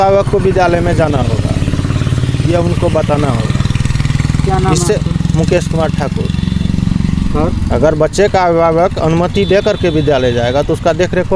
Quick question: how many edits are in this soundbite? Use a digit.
0